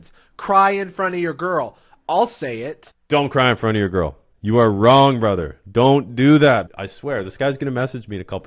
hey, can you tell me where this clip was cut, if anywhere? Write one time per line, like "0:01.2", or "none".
0:06.8